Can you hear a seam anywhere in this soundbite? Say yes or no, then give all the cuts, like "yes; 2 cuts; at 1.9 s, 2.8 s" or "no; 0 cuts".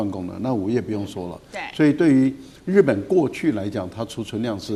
no; 0 cuts